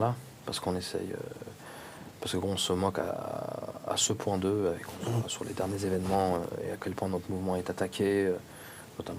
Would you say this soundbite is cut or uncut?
uncut